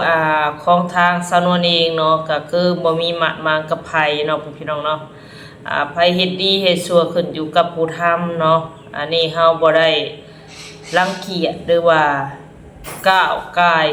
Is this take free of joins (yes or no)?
yes